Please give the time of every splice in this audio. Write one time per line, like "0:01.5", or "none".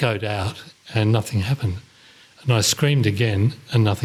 none